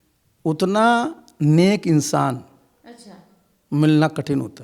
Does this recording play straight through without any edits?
yes; 0 cuts

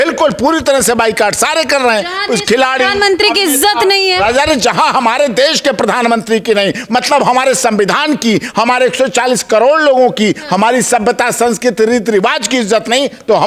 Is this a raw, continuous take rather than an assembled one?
yes; 0 cuts

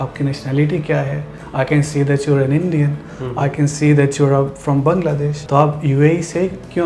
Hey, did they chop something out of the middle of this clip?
yes; 1 cut; at 5.3 s

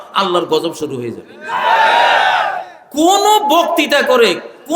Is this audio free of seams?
yes; 0 cuts

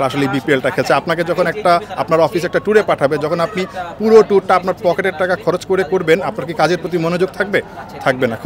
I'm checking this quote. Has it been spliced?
no; 0 cuts

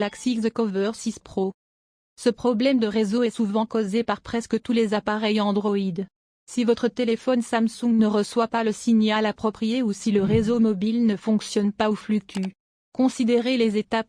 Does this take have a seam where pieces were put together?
yes; 1 cut; at 1.0 s

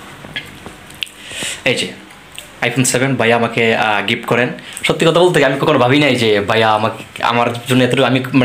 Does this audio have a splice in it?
yes; 1 cut; at 4.7 s

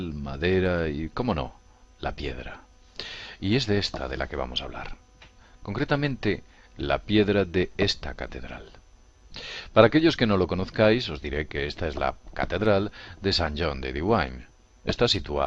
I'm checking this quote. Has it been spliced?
no; 0 cuts

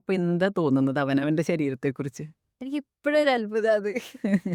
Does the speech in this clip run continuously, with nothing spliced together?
yes; 0 cuts

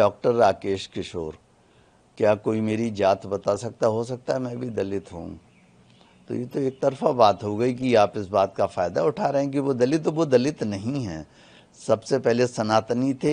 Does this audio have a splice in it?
no; 0 cuts

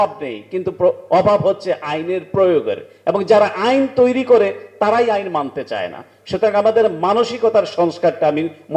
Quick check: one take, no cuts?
yes; 0 cuts

